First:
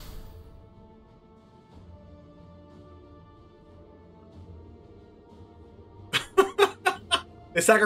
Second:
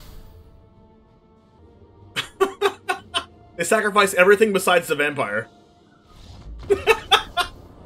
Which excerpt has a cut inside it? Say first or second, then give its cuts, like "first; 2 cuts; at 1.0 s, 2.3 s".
second; 1 cut; at 1.6 s